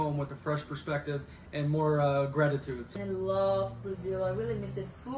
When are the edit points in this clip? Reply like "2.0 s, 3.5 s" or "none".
2.9 s

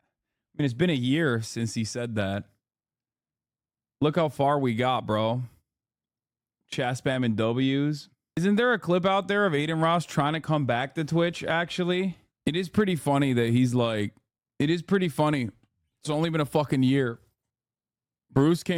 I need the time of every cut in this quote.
none

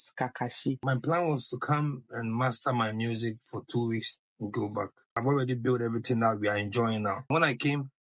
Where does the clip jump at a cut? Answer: 0.8 s, 5.2 s, 7.3 s

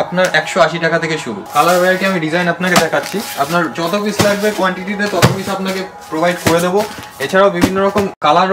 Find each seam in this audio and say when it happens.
1.3 s

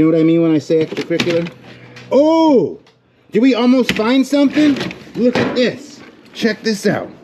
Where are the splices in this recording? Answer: none

